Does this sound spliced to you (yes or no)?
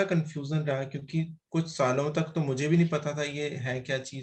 no